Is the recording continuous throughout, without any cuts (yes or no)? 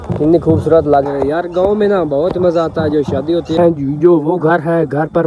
no